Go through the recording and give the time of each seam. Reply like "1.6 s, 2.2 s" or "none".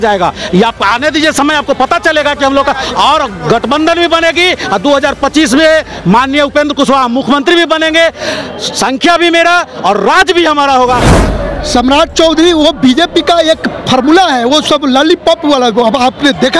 11.1 s

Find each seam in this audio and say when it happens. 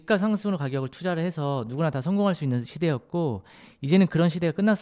none

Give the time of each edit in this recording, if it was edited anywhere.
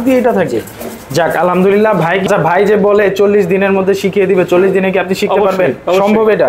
2.2 s

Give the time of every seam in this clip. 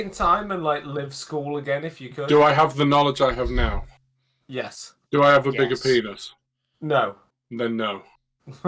none

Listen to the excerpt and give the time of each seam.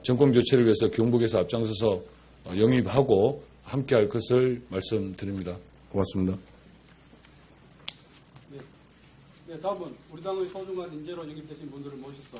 none

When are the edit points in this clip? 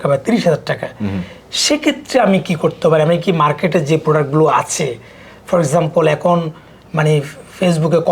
none

